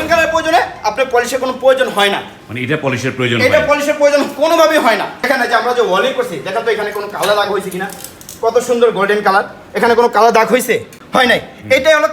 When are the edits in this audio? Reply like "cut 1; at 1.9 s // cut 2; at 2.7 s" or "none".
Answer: cut 1; at 11.0 s